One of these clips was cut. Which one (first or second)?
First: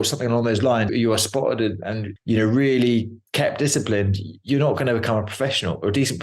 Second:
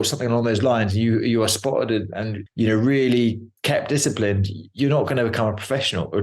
first